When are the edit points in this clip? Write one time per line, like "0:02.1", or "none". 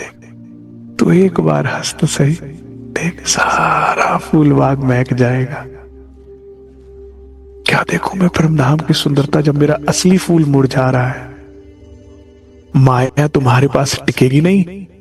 none